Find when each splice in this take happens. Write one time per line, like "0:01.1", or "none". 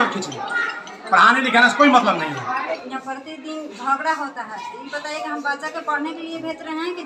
0:02.8